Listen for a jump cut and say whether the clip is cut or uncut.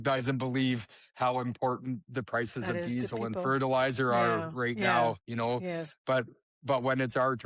uncut